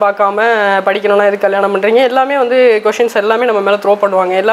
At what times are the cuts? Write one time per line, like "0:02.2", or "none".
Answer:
none